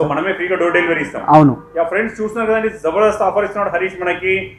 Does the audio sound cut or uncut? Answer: uncut